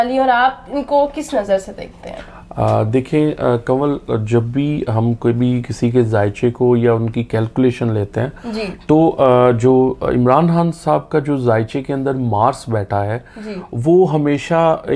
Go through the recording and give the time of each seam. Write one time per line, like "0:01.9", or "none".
none